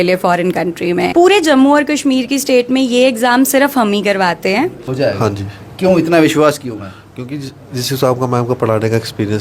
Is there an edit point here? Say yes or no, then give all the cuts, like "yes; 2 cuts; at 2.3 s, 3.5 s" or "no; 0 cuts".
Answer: yes; 2 cuts; at 1.1 s, 4.8 s